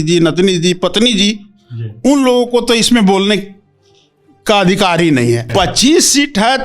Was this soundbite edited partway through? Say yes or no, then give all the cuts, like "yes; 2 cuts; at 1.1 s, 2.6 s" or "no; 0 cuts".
yes; 1 cut; at 5.4 s